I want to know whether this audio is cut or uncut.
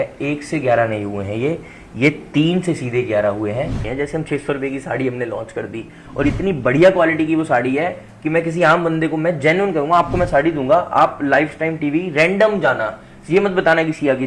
cut